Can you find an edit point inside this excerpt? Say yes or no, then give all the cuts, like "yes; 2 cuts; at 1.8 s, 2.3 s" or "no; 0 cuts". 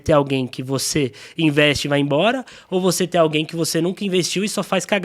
no; 0 cuts